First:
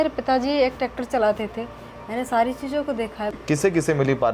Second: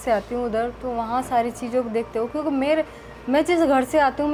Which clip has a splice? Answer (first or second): first